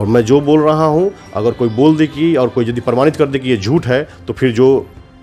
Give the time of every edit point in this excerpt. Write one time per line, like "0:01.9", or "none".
none